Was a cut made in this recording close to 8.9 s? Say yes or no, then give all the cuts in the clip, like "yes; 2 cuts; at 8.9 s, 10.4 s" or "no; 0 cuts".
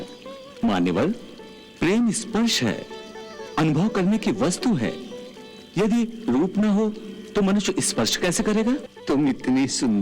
yes; 1 cut; at 8.9 s